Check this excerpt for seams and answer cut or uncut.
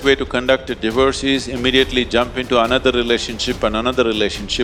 uncut